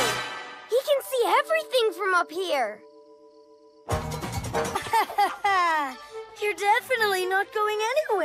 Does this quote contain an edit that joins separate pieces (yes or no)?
no